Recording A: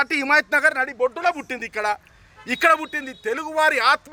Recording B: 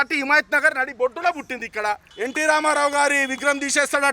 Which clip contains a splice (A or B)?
B